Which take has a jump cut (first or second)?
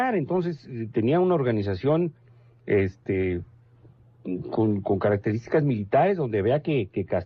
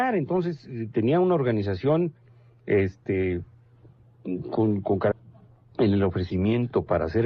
first